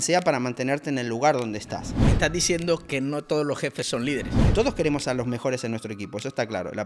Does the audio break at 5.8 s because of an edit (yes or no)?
no